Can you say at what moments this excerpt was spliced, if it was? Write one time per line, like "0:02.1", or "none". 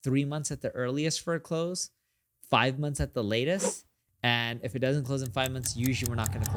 none